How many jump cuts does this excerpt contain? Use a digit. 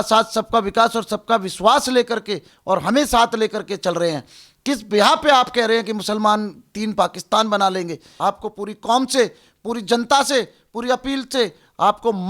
1